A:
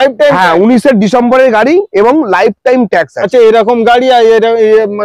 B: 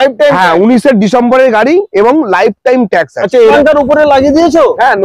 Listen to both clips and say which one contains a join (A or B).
B